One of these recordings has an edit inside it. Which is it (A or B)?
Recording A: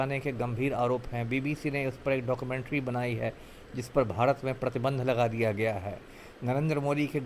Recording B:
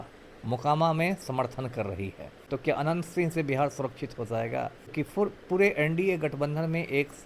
B